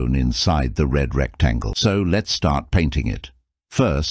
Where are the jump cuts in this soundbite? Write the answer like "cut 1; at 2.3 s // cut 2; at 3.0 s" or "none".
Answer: cut 1; at 1.7 s